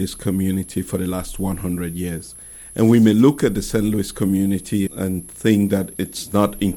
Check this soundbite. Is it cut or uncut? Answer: uncut